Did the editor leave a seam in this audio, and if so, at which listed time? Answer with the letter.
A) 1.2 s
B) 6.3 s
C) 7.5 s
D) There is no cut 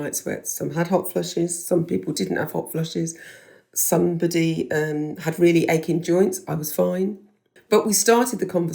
C